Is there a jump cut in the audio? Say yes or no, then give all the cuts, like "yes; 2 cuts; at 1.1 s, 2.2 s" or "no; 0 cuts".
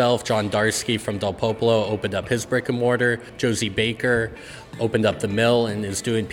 yes; 1 cut; at 3.3 s